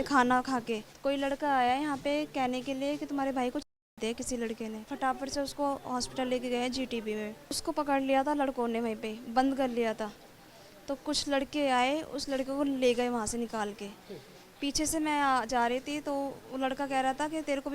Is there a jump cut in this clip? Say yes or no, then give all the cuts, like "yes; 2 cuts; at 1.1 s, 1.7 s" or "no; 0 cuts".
yes; 4 cuts; at 0.9 s, 3.8 s, 4.9 s, 7.6 s